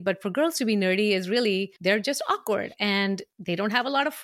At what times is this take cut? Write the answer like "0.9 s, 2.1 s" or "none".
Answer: 1.7 s, 3.3 s